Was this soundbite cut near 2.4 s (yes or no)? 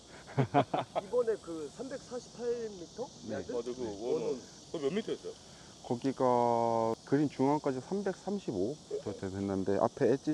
no